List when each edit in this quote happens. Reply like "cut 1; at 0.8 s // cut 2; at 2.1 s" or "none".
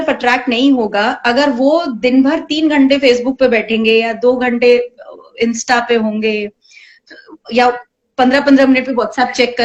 none